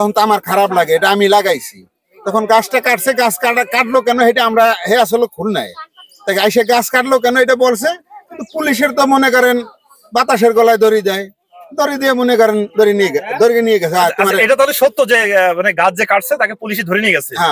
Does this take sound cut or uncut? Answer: uncut